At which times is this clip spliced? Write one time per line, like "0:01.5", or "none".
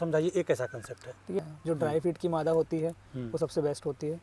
0:01.4